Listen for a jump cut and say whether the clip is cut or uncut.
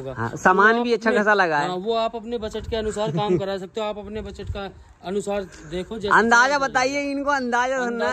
uncut